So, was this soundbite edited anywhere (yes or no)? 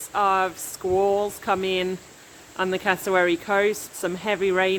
no